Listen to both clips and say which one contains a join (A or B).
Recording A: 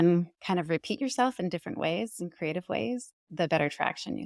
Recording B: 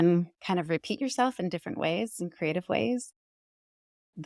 A